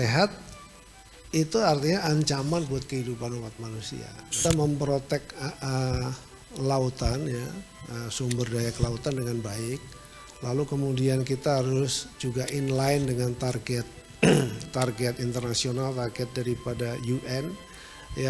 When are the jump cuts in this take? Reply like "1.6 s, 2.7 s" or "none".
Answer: 4.4 s